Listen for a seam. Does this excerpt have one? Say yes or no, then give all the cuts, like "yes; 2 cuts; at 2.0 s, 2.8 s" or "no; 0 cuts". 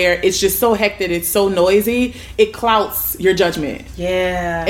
no; 0 cuts